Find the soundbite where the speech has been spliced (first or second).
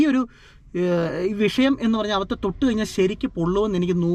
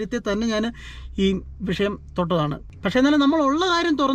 second